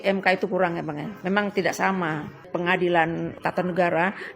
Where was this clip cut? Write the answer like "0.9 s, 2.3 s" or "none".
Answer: 1.1 s, 2.5 s, 3.4 s